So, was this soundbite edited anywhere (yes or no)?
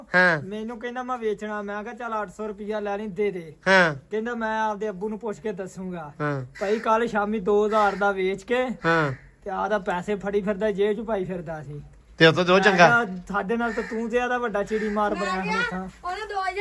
no